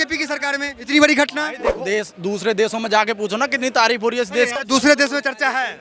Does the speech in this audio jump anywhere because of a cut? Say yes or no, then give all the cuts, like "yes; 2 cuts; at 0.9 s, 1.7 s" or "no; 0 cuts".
yes; 2 cuts; at 1.7 s, 4.6 s